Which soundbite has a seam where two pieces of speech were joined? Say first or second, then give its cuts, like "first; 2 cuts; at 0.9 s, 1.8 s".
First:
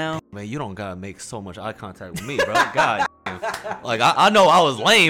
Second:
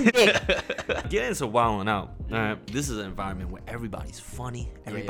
second; 2 cuts; at 1.1 s, 2.6 s